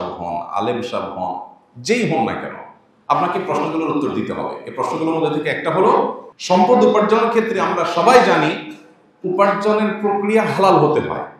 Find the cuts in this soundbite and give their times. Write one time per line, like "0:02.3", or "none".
0:06.3